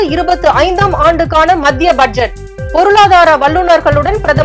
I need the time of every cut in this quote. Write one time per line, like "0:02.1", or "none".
none